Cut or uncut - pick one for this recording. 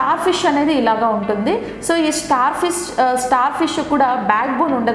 uncut